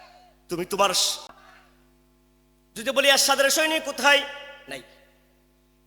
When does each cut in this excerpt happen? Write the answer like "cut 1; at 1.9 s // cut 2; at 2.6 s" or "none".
cut 1; at 1.3 s